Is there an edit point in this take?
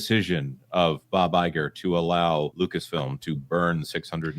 yes; 1 cut; at 2.5 s

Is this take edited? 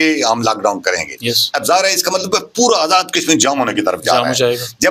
no; 0 cuts

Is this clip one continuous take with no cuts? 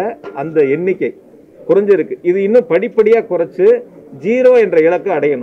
yes; 0 cuts

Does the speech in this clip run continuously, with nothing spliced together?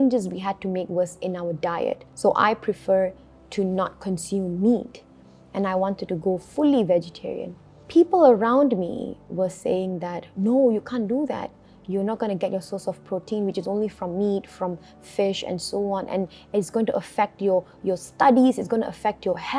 no; 2 cuts; at 2.1 s, 7.7 s

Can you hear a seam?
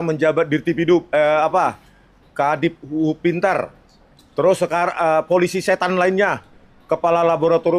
no; 0 cuts

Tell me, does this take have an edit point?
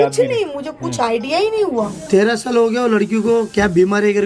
yes; 1 cut; at 2.0 s

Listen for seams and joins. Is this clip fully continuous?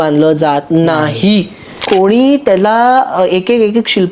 no; 1 cut; at 1.7 s

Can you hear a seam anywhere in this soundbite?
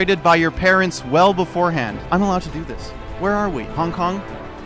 yes; 1 cut; at 2.0 s

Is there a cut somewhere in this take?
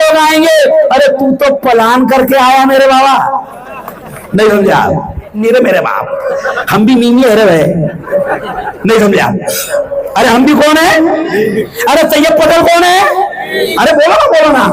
yes; 1 cut; at 5.4 s

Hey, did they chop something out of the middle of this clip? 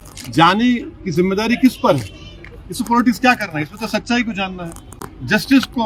no; 0 cuts

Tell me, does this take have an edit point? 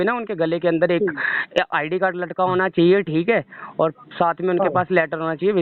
no; 0 cuts

